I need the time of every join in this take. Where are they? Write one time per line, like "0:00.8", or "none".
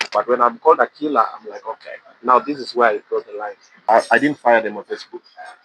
0:03.7